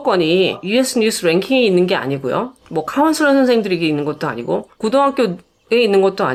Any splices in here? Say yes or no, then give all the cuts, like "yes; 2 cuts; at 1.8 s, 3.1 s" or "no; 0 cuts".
no; 0 cuts